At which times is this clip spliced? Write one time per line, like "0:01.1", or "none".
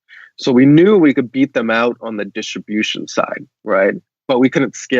0:04.1